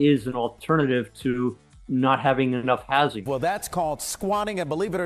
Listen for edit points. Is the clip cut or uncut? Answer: cut